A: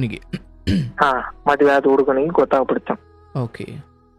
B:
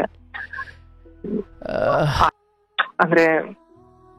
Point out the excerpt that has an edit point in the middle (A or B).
B